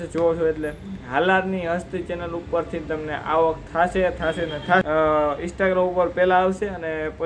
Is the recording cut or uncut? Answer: cut